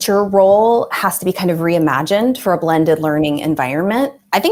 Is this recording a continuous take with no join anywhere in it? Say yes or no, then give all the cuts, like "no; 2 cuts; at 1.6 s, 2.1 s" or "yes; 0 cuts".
yes; 0 cuts